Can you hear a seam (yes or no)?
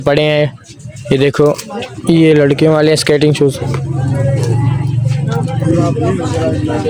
no